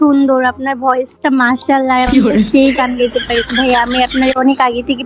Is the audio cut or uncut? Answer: uncut